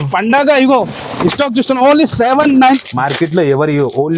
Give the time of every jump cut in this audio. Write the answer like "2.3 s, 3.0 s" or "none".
2.8 s